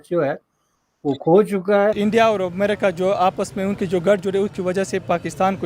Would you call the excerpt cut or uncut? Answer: cut